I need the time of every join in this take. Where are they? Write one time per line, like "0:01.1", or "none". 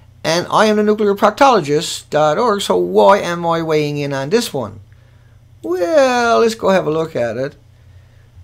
0:03.6